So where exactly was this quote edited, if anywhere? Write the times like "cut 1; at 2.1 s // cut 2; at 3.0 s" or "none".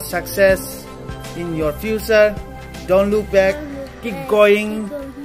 none